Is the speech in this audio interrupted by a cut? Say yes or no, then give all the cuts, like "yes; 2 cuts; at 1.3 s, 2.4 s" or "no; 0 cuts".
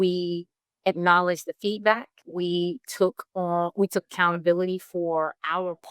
yes; 1 cut; at 2.2 s